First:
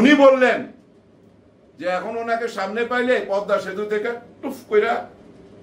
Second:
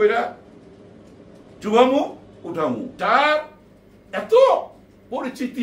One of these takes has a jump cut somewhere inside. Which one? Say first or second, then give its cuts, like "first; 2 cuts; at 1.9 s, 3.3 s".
second; 1 cut; at 2.9 s